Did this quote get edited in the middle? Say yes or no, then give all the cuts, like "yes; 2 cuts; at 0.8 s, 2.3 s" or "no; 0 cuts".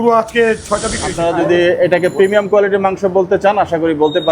yes; 1 cut; at 1.0 s